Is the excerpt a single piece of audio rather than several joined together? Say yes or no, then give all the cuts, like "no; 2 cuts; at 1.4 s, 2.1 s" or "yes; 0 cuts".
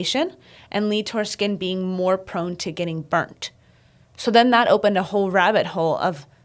yes; 0 cuts